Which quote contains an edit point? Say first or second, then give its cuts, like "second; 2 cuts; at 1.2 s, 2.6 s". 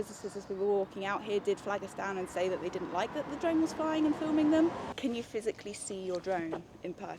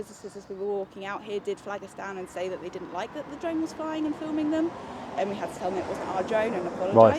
first; 1 cut; at 4.9 s